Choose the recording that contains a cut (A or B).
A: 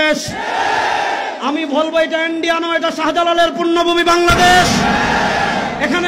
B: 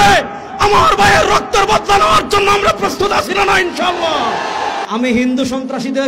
B